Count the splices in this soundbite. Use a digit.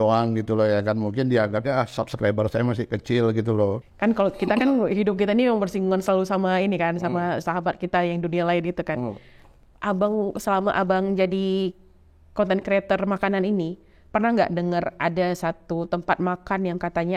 1